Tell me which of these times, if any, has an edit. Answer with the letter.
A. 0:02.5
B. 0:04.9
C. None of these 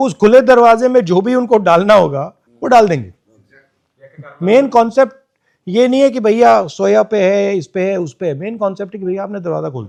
C